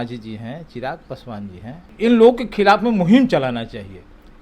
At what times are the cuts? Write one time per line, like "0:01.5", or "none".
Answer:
0:01.9